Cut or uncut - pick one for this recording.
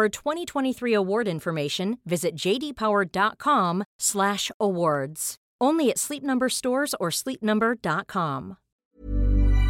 cut